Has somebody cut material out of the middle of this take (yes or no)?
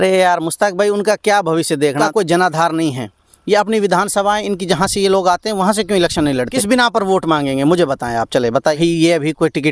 yes